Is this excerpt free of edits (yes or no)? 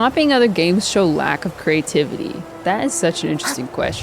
no